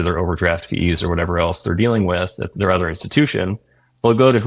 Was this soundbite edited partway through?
yes; 1 cut; at 2.5 s

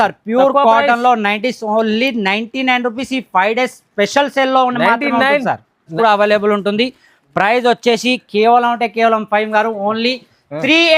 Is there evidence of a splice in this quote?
yes; 1 cut; at 5.9 s

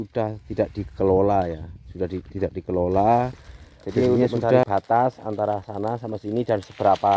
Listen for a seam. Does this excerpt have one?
yes; 1 cut; at 4.6 s

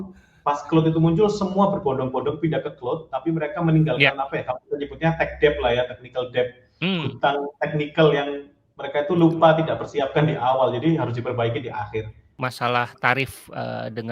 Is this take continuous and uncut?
no; 1 cut; at 12.2 s

